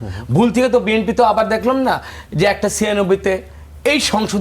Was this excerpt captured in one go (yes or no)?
yes